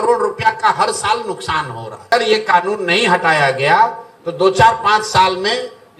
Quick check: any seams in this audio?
yes; 1 cut; at 2.1 s

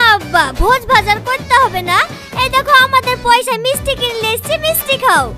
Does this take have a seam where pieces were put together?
no; 0 cuts

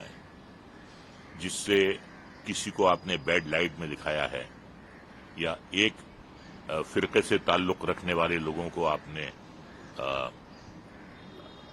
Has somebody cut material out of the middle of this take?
no; 0 cuts

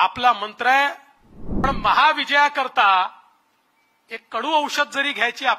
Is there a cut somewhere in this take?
yes; 1 cut; at 1.6 s

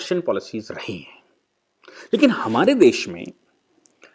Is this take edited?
no; 0 cuts

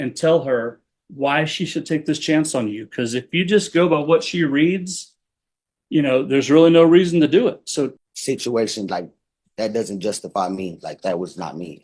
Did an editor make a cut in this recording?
yes; 1 cut; at 8.1 s

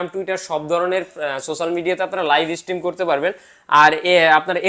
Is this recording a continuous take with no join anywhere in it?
yes; 0 cuts

